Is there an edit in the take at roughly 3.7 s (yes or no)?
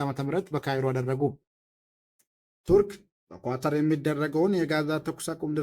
no